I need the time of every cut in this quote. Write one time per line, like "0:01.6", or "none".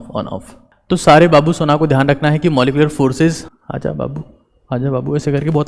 0:03.4